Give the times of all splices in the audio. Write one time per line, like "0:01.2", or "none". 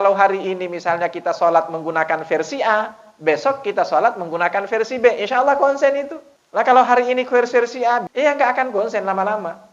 0:08.0